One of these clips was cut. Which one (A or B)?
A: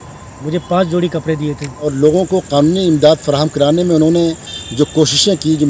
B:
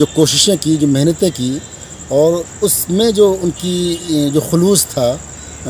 A